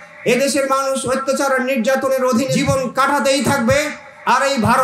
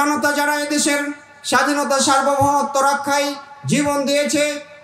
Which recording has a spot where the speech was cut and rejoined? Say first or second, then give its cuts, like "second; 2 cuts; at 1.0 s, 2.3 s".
first; 1 cut; at 2.5 s